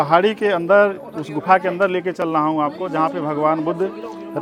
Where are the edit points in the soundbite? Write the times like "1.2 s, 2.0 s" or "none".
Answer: none